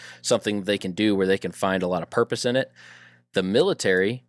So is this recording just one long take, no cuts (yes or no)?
yes